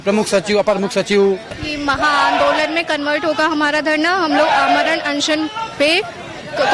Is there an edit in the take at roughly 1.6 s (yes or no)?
yes